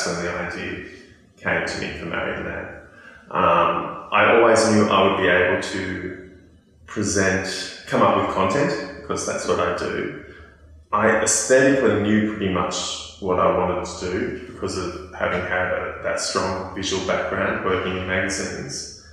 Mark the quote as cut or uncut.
uncut